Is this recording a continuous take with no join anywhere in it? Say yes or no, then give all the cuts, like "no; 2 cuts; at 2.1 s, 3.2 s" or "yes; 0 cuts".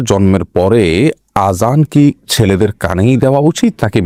yes; 0 cuts